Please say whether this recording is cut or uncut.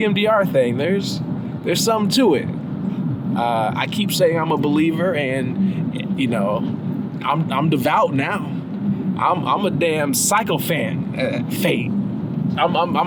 uncut